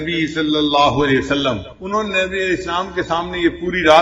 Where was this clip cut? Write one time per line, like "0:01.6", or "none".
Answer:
0:01.7